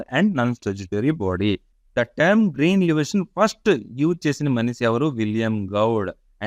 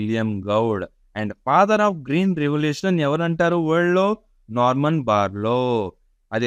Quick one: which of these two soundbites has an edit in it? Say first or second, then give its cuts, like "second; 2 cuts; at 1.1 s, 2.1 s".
first; 1 cut; at 1.7 s